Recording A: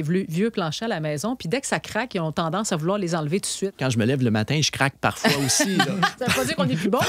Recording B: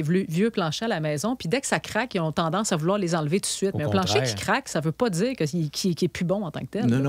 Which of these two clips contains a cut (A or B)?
A